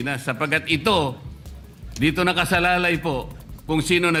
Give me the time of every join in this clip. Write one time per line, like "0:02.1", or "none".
none